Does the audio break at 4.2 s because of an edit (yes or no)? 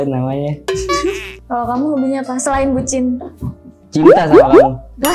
no